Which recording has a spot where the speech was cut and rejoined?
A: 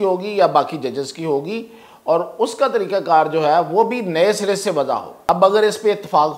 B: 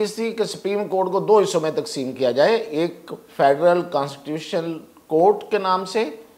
A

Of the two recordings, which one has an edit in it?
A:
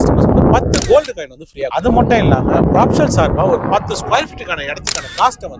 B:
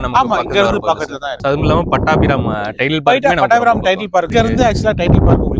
B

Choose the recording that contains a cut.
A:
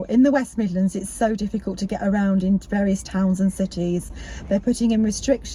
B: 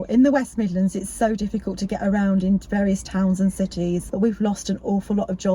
B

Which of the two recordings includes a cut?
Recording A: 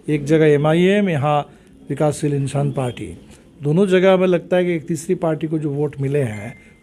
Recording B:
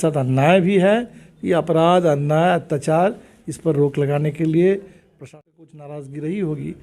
B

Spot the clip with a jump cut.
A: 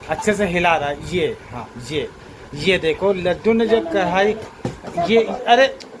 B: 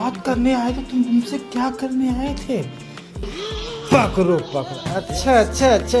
B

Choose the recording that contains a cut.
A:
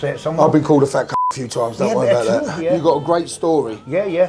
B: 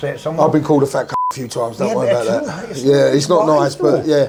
A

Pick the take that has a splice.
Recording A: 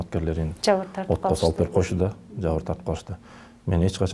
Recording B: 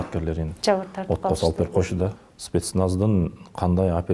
B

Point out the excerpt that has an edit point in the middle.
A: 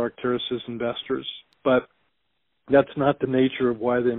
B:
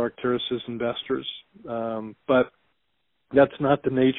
A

